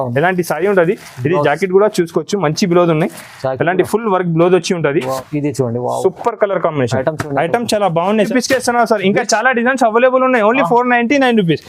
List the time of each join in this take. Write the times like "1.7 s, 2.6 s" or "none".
5.2 s, 8.2 s